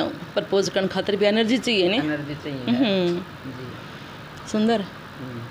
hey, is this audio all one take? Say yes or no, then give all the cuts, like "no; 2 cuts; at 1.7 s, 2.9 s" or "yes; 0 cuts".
yes; 0 cuts